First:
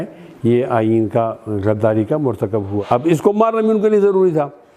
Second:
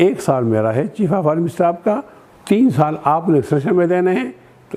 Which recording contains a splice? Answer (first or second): first